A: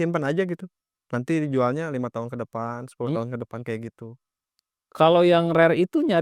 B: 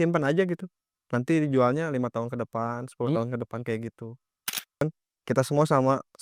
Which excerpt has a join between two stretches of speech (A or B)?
B